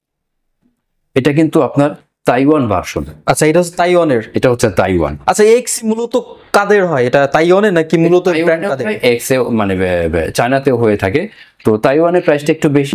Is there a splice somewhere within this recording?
no; 0 cuts

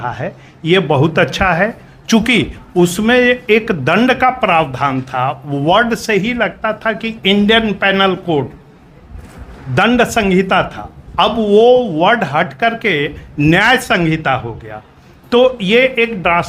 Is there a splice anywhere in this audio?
no; 0 cuts

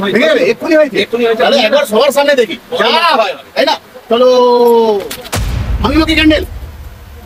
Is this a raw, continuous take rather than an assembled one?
yes; 0 cuts

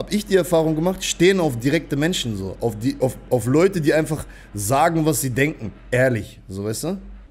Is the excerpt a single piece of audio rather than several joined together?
yes; 0 cuts

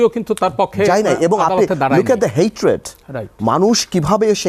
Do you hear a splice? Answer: no; 0 cuts

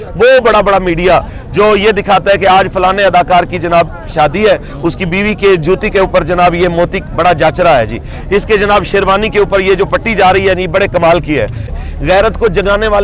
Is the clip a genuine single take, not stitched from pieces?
no; 1 cut; at 11.7 s

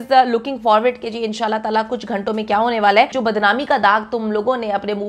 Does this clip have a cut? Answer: yes; 1 cut; at 3.1 s

